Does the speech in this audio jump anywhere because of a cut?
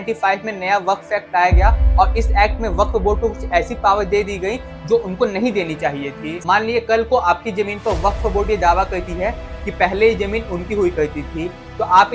yes; 1 cut; at 6.3 s

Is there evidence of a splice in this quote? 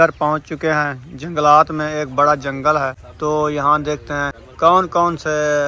yes; 2 cuts; at 3.0 s, 4.4 s

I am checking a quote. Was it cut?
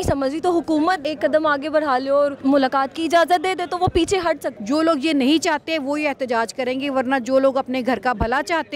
yes; 3 cuts; at 1.1 s, 2.4 s, 4.5 s

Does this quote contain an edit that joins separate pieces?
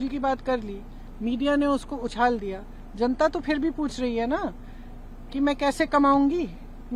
no; 0 cuts

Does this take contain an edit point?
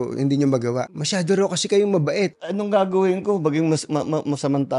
yes; 2 cuts; at 0.9 s, 2.4 s

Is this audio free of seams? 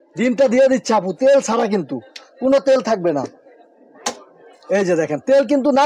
yes; 0 cuts

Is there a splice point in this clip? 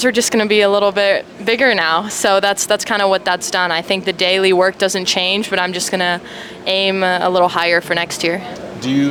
no; 0 cuts

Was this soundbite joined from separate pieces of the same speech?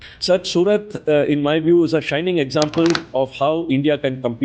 no; 0 cuts

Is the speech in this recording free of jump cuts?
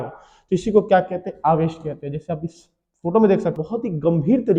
no; 1 cut; at 3.6 s

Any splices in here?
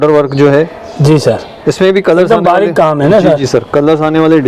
no; 0 cuts

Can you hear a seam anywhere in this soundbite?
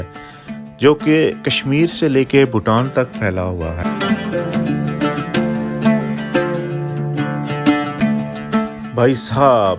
yes; 1 cut; at 3.8 s

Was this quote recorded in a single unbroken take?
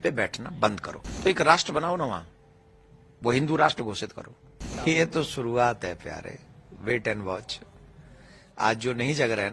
no; 2 cuts; at 1.2 s, 4.7 s

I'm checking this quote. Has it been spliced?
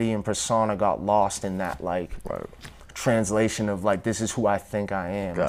no; 0 cuts

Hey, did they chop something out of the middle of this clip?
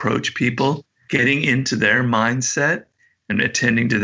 yes; 1 cut; at 0.9 s

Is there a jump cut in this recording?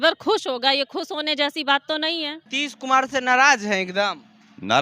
yes; 1 cut; at 2.4 s

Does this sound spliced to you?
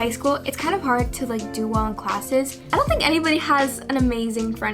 yes; 1 cut; at 2.6 s

